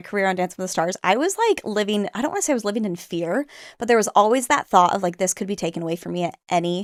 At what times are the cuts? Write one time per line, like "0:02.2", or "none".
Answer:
none